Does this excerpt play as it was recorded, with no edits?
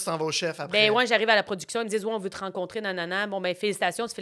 yes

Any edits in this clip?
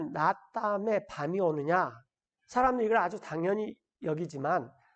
no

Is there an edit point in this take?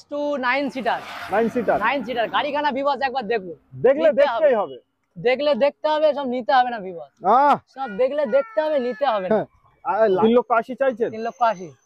yes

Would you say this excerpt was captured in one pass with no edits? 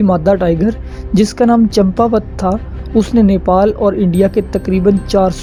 yes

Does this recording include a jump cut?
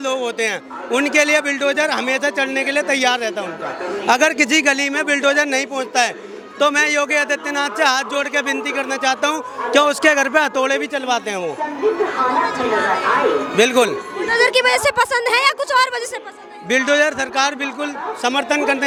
no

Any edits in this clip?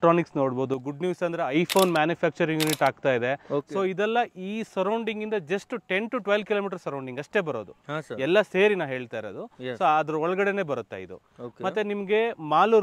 no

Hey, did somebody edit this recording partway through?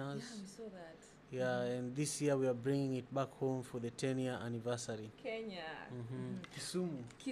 no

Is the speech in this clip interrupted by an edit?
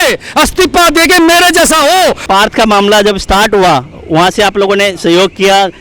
yes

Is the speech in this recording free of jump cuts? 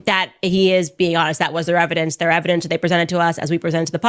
no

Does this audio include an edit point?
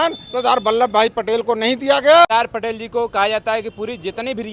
yes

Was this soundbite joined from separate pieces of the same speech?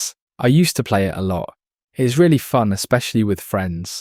no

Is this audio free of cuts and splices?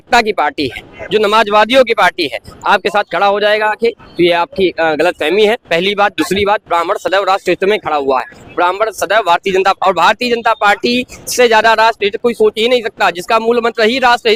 yes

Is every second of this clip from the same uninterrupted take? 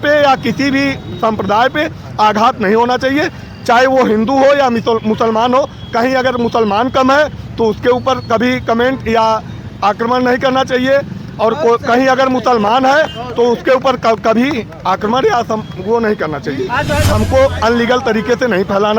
no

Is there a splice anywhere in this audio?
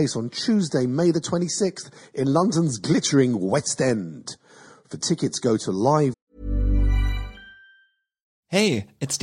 no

